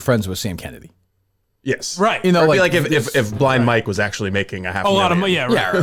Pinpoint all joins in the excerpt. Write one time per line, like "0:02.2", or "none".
none